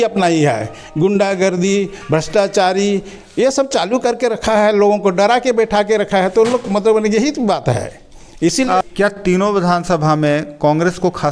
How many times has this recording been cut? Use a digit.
1